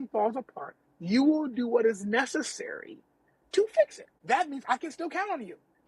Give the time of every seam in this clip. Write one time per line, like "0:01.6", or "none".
0:04.1